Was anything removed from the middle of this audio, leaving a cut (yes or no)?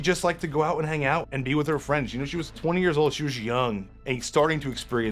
yes